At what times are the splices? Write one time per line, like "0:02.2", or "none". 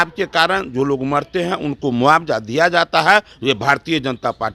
none